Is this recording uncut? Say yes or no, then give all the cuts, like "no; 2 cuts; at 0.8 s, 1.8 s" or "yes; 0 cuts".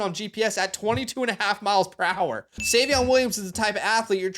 no; 1 cut; at 2.6 s